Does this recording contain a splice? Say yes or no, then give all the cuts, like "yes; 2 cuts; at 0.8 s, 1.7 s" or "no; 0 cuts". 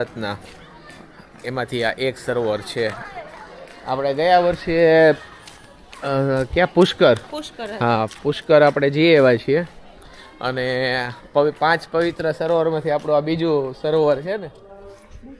no; 0 cuts